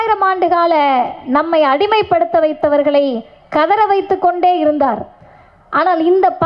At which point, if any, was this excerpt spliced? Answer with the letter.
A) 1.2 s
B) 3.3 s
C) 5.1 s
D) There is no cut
D